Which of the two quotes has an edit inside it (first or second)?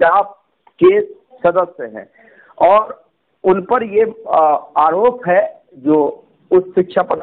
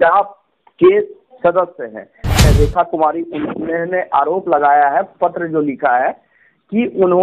second